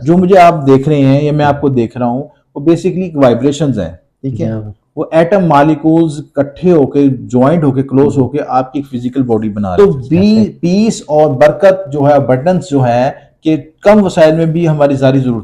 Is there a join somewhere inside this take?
yes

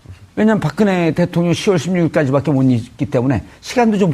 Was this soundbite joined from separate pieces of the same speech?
yes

